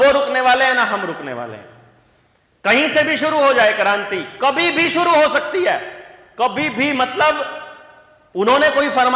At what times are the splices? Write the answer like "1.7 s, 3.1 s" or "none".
none